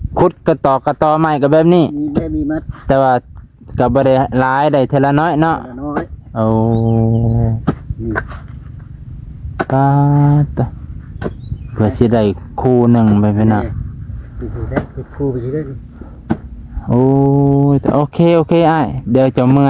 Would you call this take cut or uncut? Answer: uncut